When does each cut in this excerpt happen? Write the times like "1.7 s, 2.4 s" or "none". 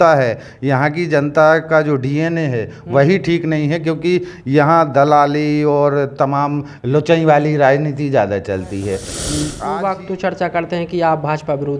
9.5 s